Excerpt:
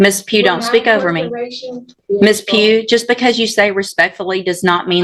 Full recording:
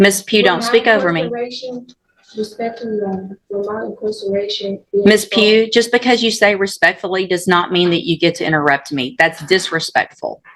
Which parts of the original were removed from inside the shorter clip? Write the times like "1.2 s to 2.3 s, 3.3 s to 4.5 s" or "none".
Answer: 1.9 s to 4.8 s